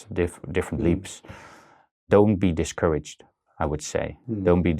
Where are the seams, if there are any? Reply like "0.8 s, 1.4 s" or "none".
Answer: 2.1 s